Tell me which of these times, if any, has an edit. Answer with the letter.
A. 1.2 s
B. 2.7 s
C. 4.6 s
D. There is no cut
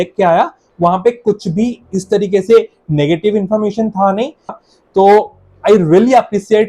C